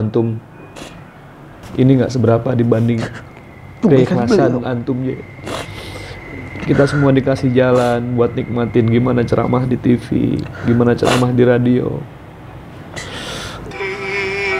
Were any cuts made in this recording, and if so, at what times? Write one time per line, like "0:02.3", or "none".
0:01.5
0:13.7